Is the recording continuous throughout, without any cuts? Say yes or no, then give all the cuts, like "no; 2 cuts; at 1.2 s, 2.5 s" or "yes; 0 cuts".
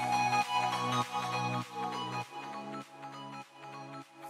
yes; 0 cuts